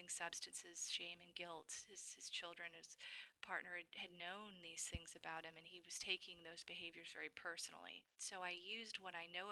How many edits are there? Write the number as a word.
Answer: one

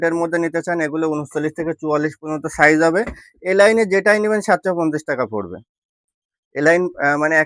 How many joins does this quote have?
zero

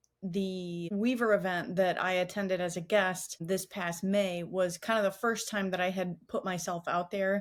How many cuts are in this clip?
zero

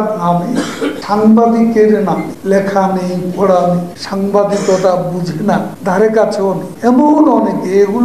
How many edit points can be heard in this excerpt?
five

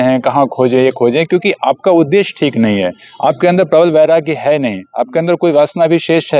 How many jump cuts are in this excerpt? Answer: zero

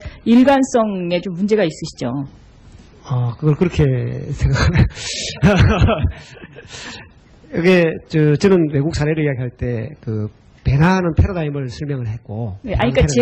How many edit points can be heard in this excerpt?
zero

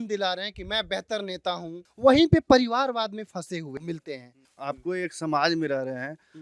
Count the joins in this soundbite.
two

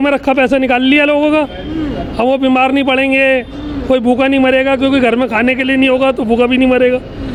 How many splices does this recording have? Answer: zero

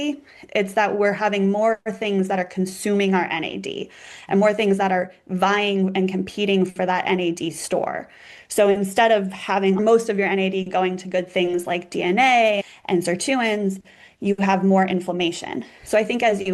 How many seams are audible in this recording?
one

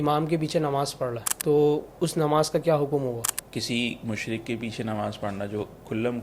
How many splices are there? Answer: two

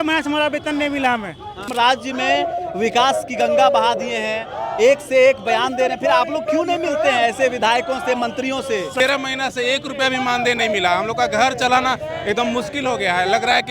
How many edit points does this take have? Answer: two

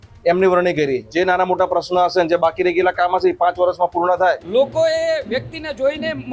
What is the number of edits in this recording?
two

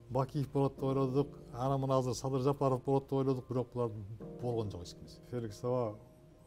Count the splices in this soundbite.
one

